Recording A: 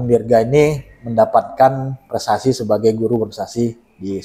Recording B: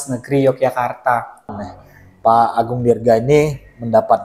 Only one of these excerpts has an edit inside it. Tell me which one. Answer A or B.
B